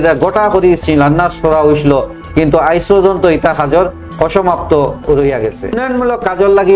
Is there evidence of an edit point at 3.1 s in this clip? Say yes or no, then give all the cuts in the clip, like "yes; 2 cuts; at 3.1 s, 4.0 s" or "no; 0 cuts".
no; 1 cut; at 5.8 s